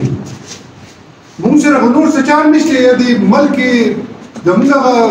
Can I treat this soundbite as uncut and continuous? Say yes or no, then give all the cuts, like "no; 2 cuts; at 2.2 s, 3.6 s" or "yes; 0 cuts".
yes; 0 cuts